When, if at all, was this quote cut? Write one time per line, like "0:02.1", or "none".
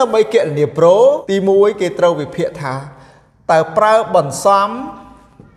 0:01.2